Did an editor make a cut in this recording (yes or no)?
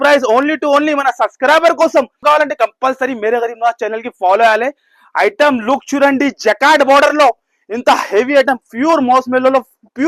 yes